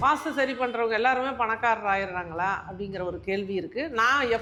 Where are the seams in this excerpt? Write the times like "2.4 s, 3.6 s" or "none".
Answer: none